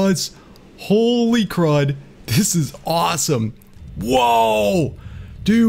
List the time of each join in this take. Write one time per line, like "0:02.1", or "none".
0:03.8